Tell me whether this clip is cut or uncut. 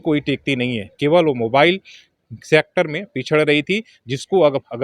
uncut